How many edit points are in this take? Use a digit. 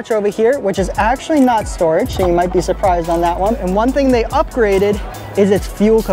1